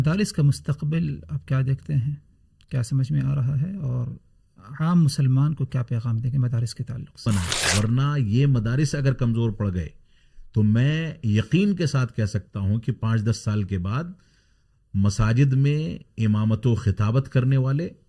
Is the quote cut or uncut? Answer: cut